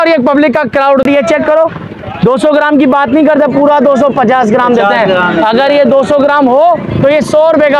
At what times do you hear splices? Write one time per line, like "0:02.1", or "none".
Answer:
0:01.0

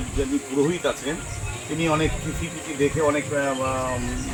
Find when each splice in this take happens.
none

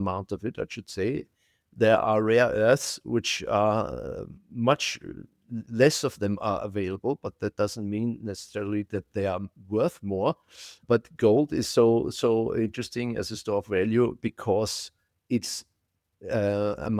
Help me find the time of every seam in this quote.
0:01.6
0:10.8

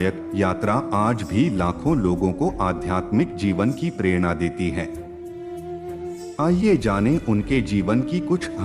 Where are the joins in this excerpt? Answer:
none

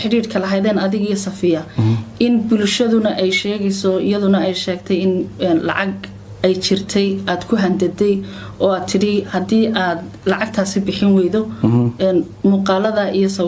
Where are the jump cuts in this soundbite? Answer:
none

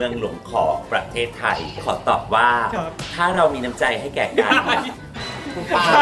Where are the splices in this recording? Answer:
none

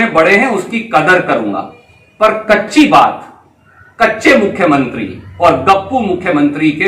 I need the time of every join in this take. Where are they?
none

